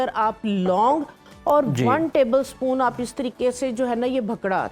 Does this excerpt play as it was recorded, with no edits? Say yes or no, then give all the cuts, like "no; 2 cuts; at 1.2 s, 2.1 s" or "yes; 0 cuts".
yes; 0 cuts